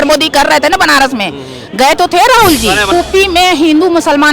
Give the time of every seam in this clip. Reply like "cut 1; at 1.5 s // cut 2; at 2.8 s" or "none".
cut 1; at 2.9 s